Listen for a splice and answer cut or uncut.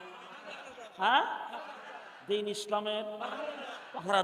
uncut